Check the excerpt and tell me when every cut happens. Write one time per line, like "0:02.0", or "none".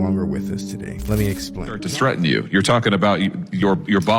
0:01.8